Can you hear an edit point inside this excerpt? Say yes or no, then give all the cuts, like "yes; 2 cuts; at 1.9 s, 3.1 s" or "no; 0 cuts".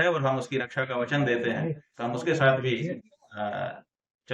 no; 0 cuts